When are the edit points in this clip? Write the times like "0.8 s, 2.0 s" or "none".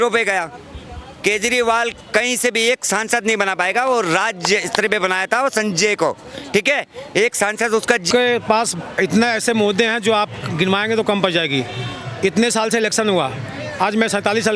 8.1 s

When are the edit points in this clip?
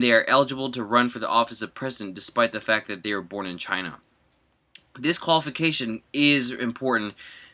2.5 s

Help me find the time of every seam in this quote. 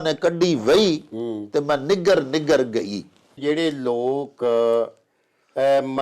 3.3 s

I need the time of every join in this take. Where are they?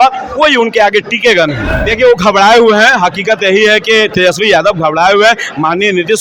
1.7 s

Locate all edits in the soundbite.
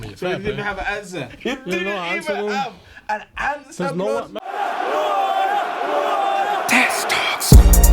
4.3 s

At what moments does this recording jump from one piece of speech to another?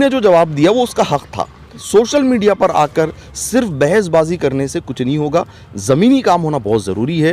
1.8 s

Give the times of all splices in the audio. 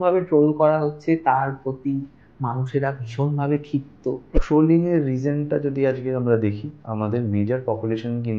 4.4 s

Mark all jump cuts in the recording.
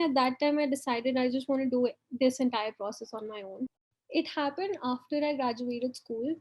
3.8 s

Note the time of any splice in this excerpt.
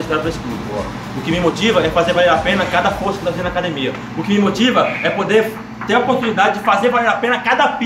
none

